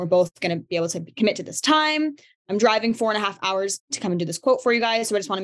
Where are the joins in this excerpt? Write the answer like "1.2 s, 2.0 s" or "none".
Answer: 2.4 s, 3.9 s